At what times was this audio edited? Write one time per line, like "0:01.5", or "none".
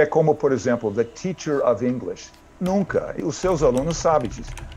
0:03.2

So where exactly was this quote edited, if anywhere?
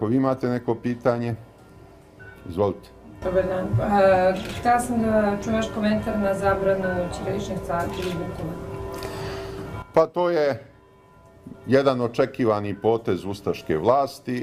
none

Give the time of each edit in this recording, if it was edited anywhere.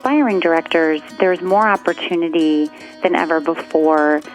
none

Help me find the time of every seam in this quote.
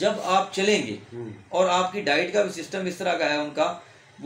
none

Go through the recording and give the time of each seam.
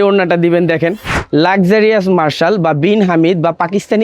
0:01.2

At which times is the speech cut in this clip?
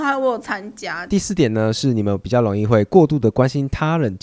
0:01.1

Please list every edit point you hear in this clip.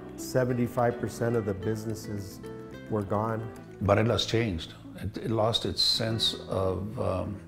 0:03.6

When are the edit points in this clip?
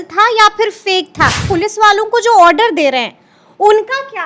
0:01.5

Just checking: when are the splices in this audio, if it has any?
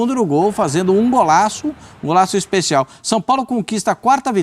none

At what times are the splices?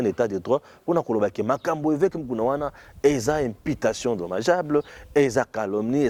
none

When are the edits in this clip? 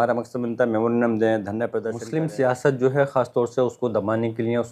0:01.9

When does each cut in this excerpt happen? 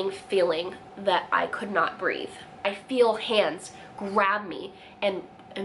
0:02.8

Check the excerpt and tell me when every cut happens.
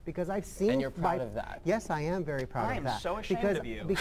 none

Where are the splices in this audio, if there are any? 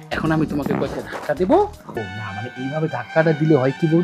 0:02.1

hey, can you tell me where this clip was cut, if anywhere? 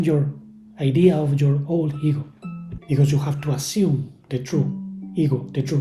0:02.7

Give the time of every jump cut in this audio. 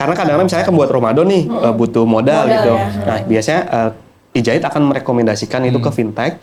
none

